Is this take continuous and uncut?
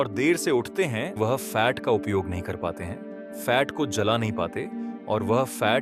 no; 1 cut; at 1.2 s

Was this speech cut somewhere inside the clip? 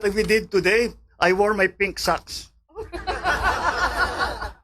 no; 0 cuts

